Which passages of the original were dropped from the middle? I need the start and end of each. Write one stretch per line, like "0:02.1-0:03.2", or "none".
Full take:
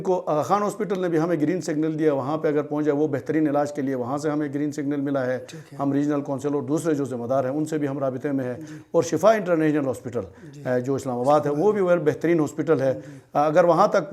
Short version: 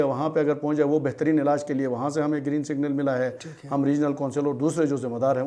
none